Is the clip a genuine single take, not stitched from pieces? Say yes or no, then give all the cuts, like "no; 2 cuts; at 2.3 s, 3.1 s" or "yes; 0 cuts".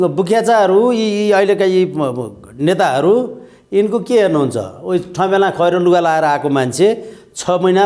yes; 0 cuts